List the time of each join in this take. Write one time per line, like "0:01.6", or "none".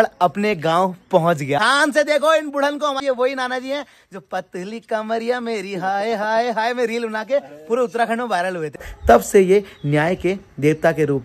0:01.6
0:03.0
0:08.9